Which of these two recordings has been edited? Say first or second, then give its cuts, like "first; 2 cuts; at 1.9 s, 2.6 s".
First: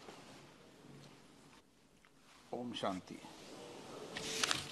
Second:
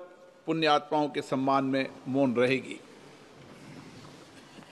first; 1 cut; at 1.6 s